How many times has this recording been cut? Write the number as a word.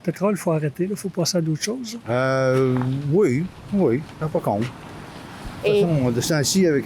zero